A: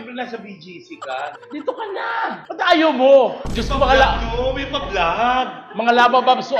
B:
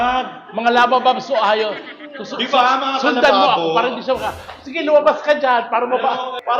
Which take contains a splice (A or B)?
A